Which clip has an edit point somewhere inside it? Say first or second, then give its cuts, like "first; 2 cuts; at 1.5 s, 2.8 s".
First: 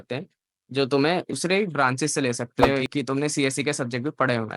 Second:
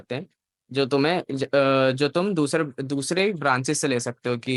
first; 2 cuts; at 1.3 s, 2.7 s